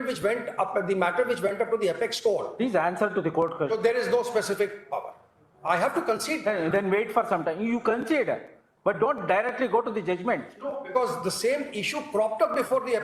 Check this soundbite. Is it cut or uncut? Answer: uncut